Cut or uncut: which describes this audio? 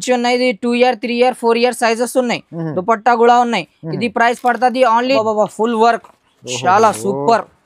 cut